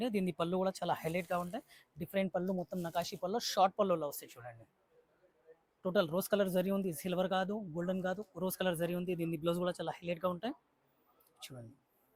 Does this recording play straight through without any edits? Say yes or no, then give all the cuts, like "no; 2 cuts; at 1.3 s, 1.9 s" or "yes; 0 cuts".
yes; 0 cuts